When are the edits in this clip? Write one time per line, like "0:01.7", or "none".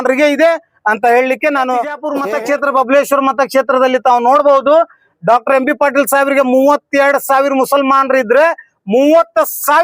0:02.1